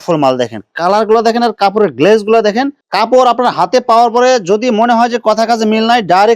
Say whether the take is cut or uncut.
cut